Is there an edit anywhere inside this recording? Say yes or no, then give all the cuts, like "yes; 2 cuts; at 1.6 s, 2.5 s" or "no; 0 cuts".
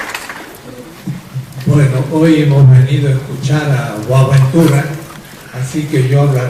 no; 0 cuts